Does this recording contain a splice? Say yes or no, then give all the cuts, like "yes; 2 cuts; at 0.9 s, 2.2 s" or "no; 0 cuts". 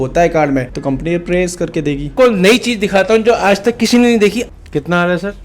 yes; 2 cuts; at 2.1 s, 4.5 s